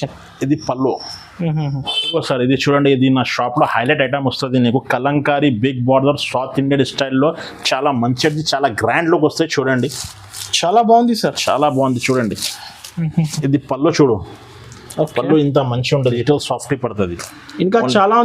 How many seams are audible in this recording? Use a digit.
2